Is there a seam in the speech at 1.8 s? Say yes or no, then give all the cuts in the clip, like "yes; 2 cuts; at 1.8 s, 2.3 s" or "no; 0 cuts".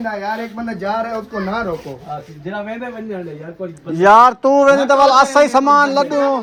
no; 0 cuts